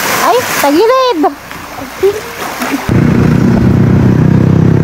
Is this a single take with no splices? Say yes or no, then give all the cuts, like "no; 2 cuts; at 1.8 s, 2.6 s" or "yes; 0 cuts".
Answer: no; 1 cut; at 2.9 s